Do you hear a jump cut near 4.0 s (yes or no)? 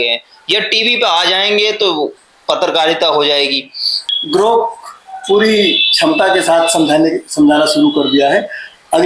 yes